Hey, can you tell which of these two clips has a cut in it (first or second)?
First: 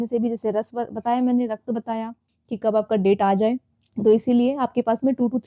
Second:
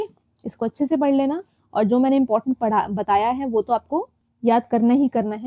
first